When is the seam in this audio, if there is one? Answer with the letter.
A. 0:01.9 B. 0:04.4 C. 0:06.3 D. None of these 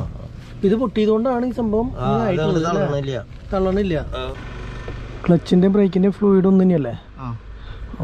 B